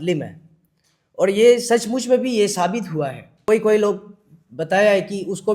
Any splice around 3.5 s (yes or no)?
yes